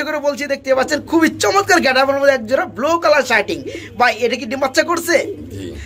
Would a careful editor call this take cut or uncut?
uncut